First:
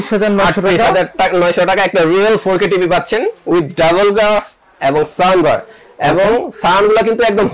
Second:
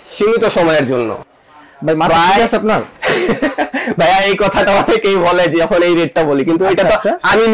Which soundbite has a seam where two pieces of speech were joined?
second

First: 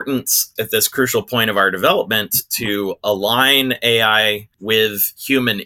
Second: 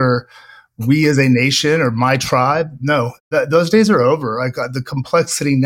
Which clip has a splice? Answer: first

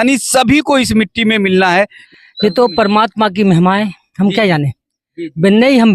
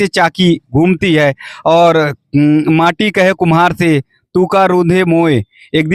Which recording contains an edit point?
first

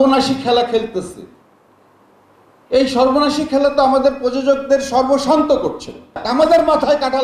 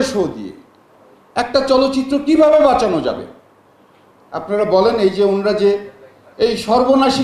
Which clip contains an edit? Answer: first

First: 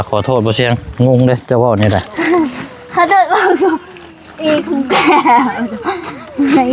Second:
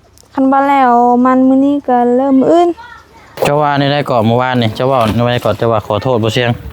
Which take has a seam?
second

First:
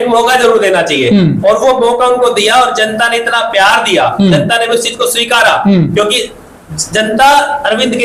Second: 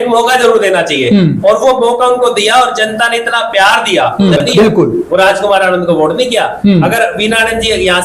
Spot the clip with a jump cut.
second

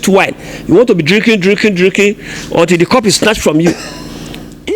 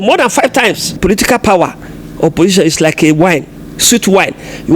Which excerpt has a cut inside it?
second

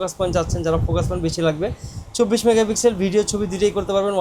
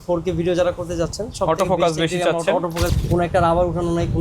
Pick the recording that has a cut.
second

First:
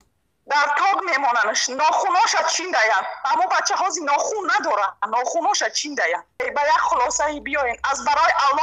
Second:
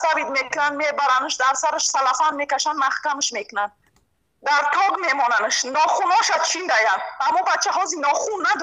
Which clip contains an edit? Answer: first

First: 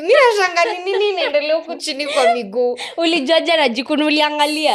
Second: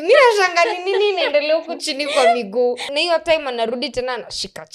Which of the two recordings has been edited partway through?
second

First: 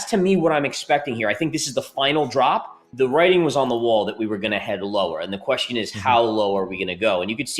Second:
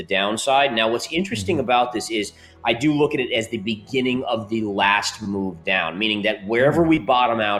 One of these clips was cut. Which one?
first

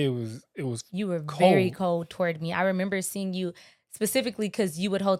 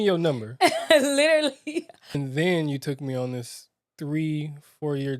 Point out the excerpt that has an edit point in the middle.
second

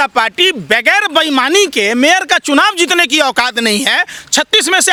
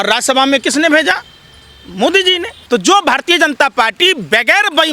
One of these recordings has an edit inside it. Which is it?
second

